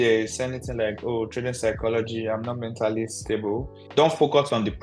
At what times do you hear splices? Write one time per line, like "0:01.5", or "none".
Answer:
0:03.8